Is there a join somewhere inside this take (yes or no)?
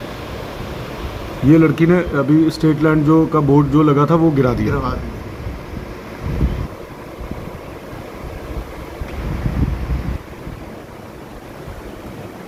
no